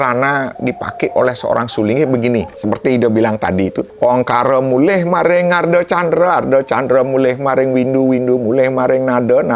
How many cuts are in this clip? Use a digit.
2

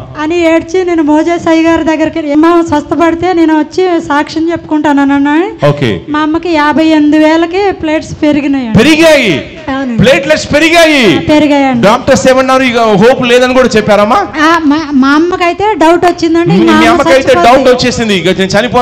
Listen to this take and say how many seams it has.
1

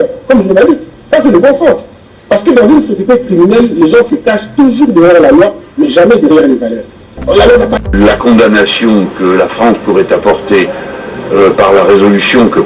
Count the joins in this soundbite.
1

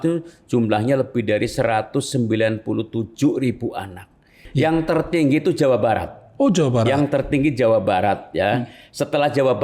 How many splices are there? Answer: 1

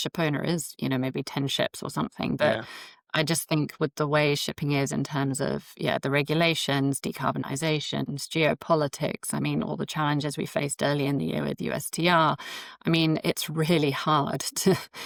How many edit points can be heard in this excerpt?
0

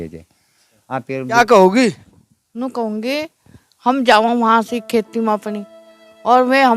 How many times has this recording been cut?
1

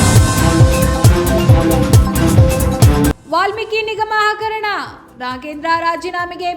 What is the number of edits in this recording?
1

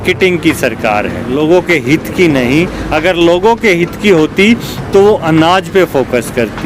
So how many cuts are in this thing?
1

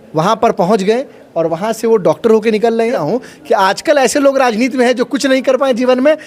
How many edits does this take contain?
1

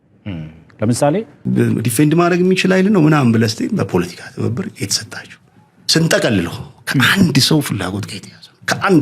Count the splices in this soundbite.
1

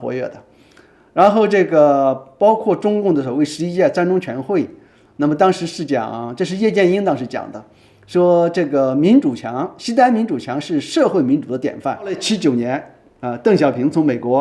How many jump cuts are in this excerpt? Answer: 1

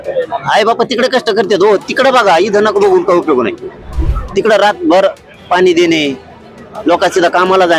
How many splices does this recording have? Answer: 0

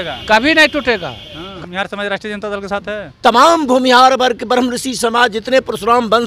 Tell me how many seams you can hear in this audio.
1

